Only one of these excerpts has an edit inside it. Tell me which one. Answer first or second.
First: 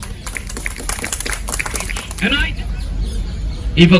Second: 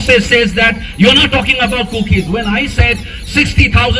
first